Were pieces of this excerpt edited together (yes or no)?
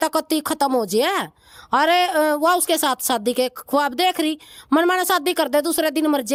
no